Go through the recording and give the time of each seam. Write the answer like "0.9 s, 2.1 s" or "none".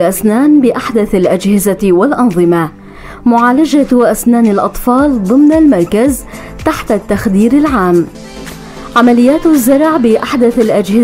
9.3 s